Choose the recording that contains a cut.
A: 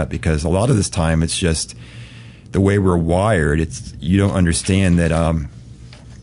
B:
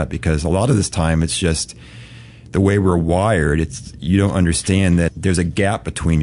B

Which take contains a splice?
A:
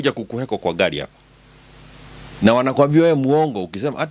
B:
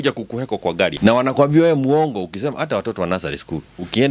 B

